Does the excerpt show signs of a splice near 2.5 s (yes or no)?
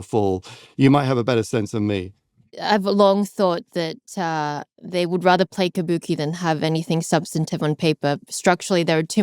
yes